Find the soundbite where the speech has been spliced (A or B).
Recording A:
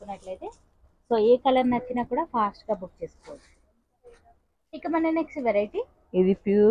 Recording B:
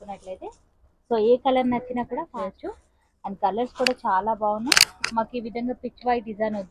B